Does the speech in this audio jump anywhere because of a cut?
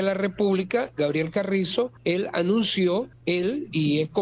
yes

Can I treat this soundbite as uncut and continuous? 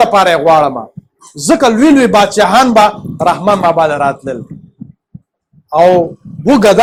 yes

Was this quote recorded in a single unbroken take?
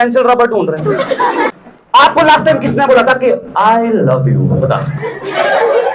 no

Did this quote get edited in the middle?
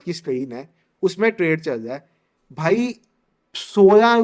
no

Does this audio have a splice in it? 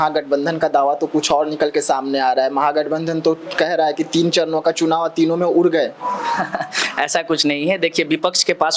no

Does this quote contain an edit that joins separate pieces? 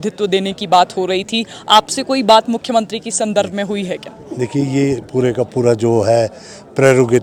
no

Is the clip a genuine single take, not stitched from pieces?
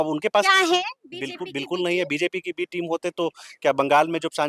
yes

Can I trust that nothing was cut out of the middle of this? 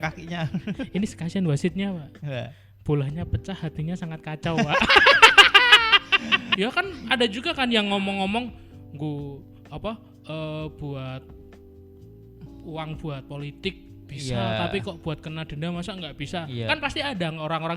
no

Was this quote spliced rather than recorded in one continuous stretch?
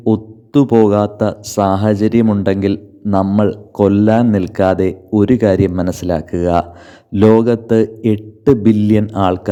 no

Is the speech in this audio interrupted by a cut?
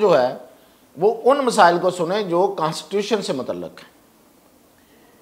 no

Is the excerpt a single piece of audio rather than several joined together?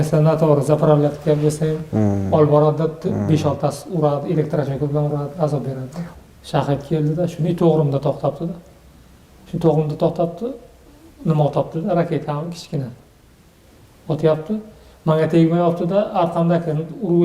no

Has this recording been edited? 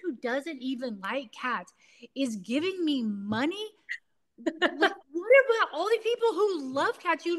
no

